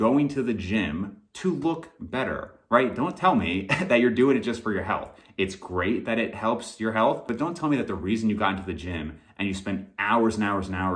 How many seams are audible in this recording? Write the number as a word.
one